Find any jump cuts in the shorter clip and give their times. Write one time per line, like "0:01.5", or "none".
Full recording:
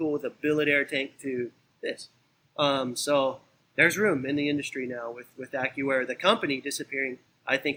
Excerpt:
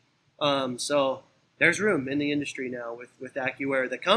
none

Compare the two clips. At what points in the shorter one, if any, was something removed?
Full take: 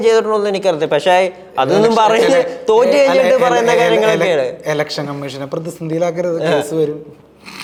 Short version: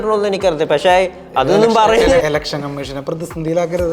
0:02.3

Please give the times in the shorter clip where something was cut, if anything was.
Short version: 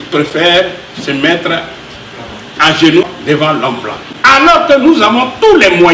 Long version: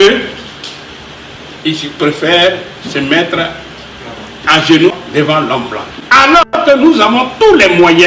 0:04.8

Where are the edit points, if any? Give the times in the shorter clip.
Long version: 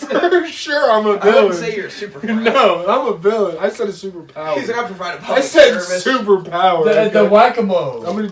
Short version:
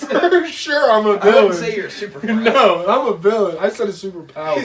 none

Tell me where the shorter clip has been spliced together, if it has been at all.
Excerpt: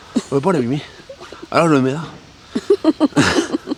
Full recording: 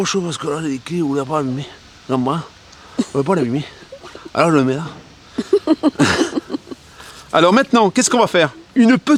none

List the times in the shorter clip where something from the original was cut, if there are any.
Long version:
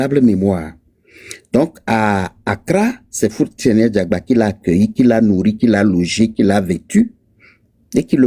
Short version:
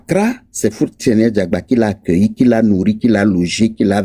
none

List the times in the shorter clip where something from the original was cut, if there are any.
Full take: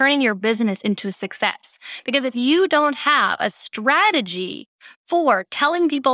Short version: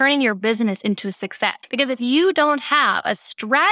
0:01.6

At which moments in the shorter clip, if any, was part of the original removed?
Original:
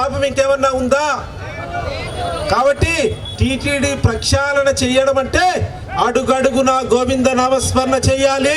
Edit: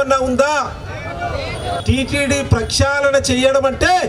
0:01.8

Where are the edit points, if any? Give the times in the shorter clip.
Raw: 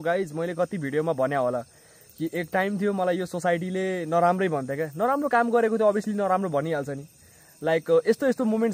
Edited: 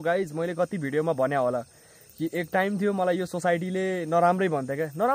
none

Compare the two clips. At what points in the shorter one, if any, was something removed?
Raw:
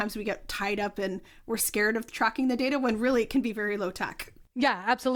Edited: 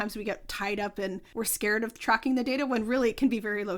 0:01.2

